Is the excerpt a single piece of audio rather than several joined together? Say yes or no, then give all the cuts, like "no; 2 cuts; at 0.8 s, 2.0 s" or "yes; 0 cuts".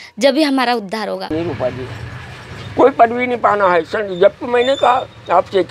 no; 1 cut; at 1.3 s